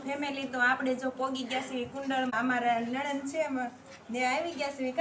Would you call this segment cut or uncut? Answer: uncut